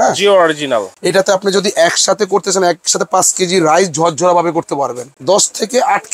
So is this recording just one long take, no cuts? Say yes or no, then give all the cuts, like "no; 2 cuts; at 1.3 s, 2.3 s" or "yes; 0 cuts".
no; 2 cuts; at 1.0 s, 5.1 s